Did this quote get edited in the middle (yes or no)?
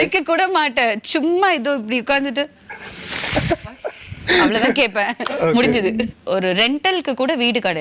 yes